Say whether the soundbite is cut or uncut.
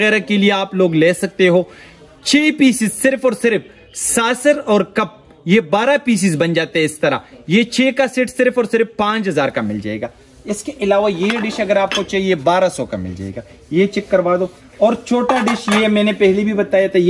uncut